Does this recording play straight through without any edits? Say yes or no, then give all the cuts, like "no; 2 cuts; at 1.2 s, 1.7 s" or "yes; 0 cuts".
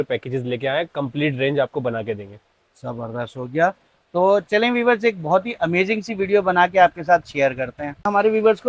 yes; 0 cuts